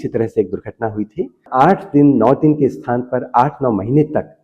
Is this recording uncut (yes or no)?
no